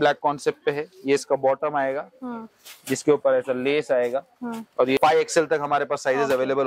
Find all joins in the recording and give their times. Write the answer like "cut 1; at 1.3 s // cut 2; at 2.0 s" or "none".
cut 1; at 5.0 s

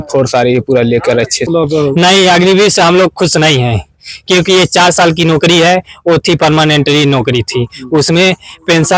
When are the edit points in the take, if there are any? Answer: cut 1; at 1.5 s

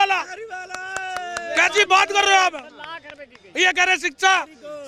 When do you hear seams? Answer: none

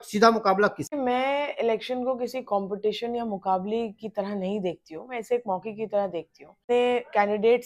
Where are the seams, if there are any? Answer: cut 1; at 0.9 s // cut 2; at 6.6 s

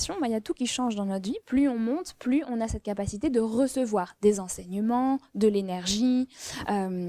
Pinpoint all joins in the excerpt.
cut 1; at 1.4 s

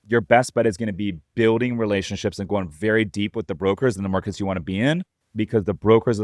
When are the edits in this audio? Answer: cut 1; at 5.2 s

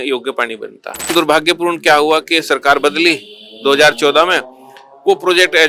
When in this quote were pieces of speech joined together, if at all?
cut 1; at 1.1 s

